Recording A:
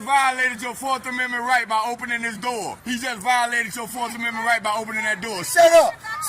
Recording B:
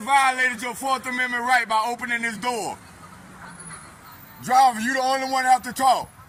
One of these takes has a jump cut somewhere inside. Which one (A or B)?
A